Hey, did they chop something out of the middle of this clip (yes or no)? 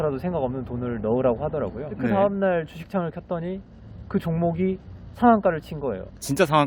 yes